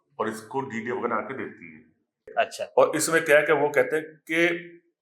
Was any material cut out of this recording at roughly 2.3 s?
yes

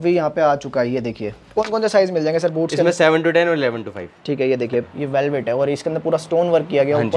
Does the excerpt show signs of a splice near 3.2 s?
no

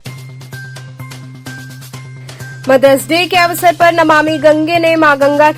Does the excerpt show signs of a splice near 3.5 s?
no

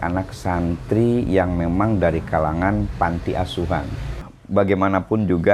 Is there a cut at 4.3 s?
yes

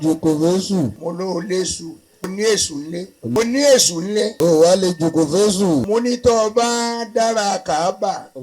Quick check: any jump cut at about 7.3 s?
no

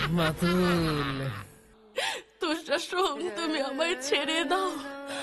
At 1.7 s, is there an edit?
yes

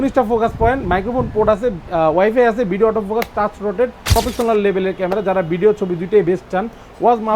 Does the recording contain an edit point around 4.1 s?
yes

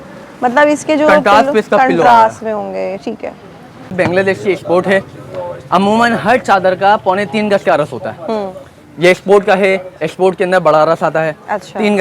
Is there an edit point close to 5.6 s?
no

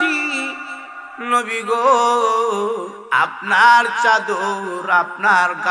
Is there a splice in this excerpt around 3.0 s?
yes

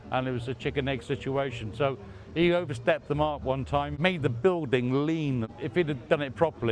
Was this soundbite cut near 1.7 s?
no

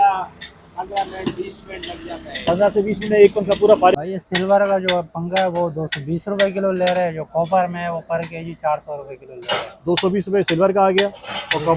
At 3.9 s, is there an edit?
yes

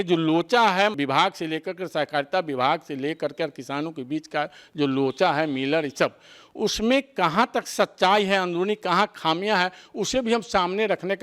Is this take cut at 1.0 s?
yes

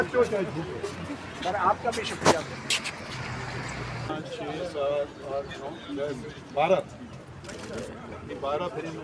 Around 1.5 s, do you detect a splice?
no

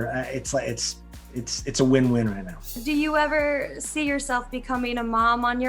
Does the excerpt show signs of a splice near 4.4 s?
no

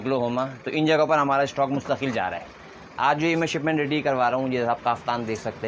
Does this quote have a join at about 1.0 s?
no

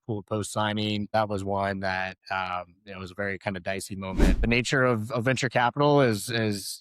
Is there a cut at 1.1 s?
yes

